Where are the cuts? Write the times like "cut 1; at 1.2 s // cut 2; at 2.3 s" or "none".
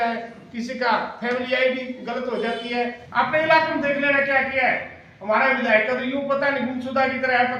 cut 1; at 3.0 s